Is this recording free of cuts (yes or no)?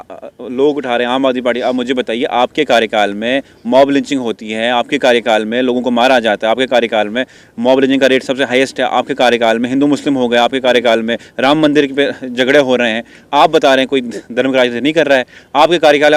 yes